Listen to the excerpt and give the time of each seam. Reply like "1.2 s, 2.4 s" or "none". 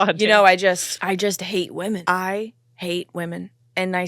0.9 s, 2.0 s